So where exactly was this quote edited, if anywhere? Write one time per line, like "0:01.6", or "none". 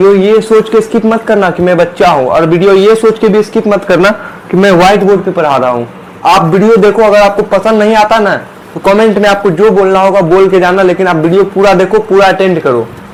none